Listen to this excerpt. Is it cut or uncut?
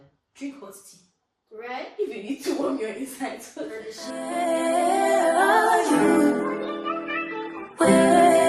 cut